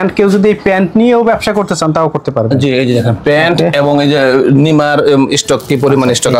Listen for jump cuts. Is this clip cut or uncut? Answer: uncut